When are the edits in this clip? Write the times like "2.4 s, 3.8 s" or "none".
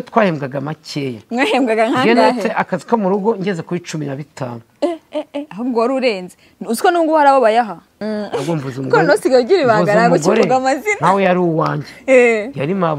8.0 s

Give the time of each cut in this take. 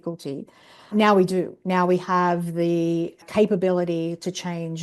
0.9 s, 3.2 s

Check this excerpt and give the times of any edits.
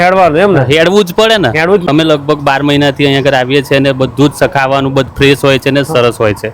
1.8 s

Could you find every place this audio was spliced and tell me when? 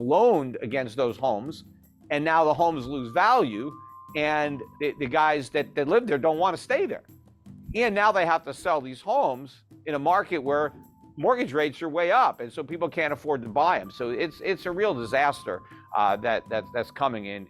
4.6 s

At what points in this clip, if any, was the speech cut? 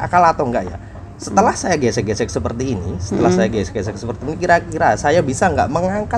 none

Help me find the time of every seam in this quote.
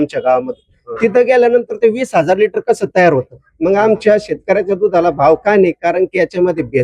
3.4 s

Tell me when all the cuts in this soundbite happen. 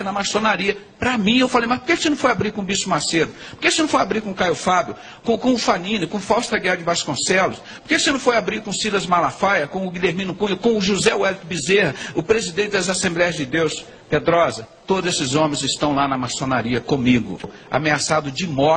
17.5 s

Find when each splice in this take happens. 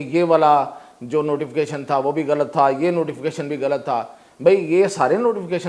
none

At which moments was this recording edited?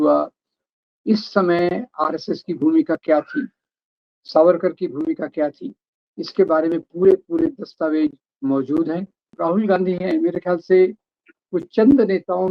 9.3 s

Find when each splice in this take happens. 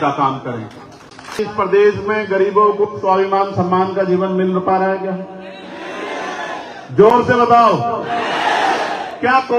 1.4 s

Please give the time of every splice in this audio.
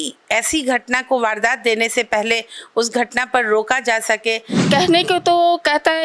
4.6 s

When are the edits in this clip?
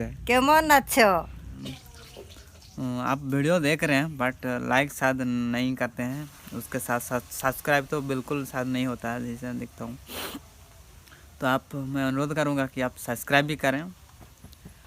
1.5 s

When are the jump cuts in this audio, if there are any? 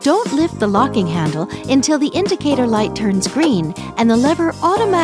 none

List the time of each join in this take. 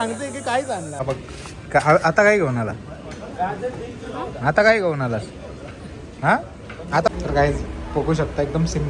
1.0 s, 7.1 s

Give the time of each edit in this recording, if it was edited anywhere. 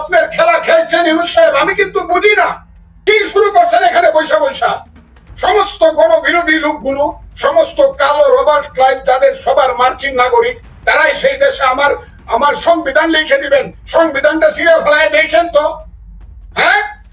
3.0 s

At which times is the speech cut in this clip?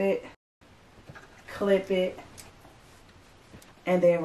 none

